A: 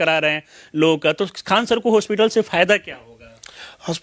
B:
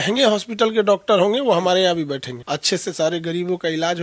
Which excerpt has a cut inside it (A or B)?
B